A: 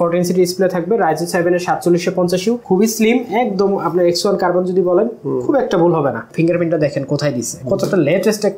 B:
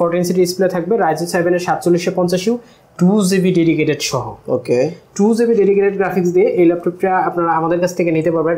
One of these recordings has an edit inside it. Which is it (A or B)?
A